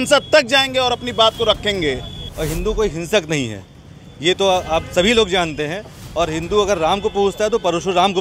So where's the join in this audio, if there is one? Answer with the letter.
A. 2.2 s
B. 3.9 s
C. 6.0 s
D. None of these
A